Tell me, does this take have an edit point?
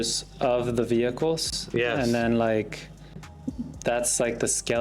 no; 0 cuts

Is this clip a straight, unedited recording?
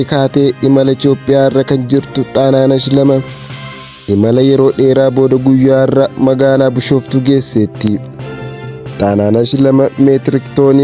yes; 0 cuts

